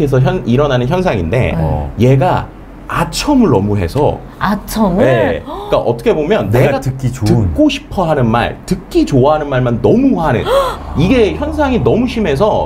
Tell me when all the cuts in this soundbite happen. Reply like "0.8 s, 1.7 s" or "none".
none